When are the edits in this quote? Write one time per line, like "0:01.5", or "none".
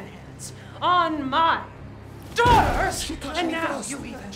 none